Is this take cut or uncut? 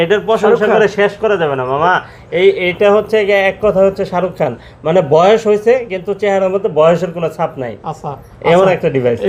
uncut